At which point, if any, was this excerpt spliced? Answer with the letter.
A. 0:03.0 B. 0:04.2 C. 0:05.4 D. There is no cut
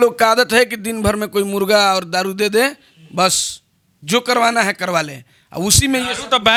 D